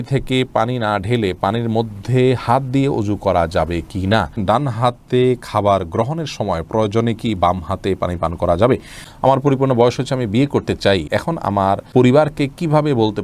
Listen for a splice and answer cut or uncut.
cut